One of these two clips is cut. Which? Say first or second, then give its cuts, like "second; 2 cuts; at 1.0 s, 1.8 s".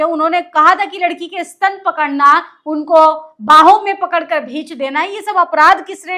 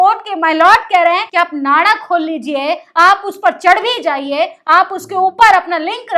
second; 1 cut; at 1.3 s